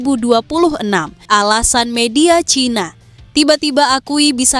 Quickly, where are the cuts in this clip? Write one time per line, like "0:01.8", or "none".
0:01.1